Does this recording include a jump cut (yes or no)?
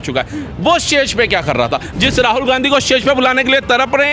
yes